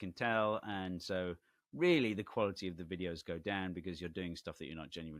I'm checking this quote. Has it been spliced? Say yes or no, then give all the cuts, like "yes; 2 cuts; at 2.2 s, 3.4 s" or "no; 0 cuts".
no; 0 cuts